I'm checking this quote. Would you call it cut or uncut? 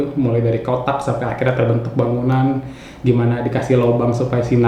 uncut